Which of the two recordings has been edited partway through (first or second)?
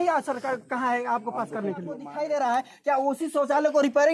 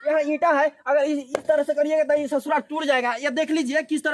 first